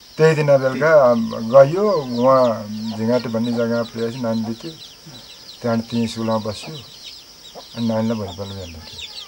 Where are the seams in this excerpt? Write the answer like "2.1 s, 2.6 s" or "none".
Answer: none

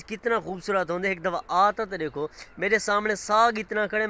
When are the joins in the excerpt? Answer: none

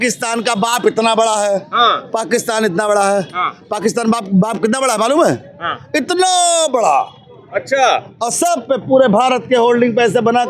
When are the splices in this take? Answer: none

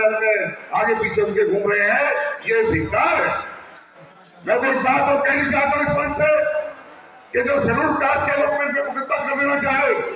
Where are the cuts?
none

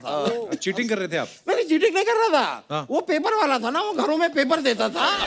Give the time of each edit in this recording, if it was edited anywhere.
none

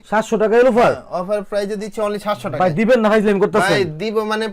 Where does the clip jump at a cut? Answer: none

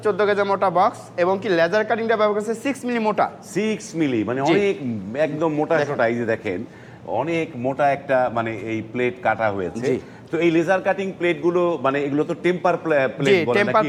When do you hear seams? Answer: none

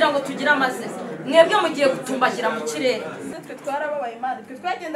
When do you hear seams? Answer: 3.3 s

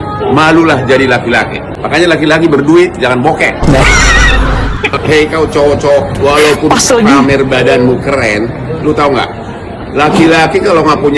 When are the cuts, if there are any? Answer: 1.6 s

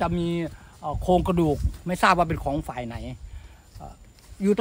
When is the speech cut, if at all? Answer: none

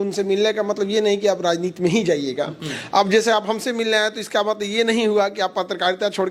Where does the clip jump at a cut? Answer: none

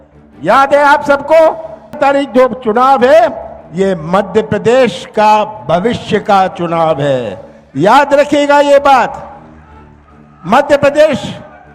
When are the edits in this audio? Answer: 2.0 s

